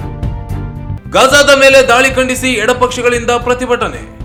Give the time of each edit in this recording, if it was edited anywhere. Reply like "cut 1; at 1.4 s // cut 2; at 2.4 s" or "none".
none